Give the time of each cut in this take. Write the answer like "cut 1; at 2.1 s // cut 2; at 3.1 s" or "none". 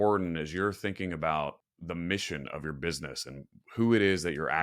cut 1; at 1.7 s

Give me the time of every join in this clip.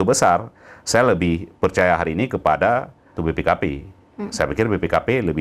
cut 1; at 3.2 s

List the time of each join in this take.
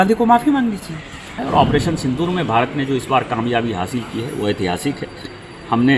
cut 1; at 1.4 s

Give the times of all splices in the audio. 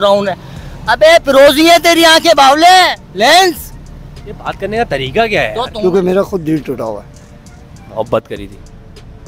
cut 1; at 5.7 s

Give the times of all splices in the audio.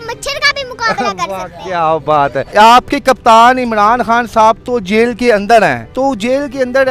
cut 1; at 2.4 s // cut 2; at 5.8 s

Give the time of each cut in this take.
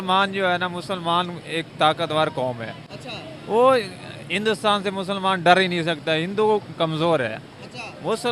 none

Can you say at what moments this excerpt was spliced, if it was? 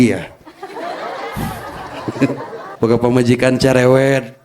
cut 1; at 2.6 s

